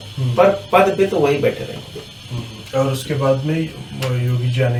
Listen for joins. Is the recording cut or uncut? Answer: uncut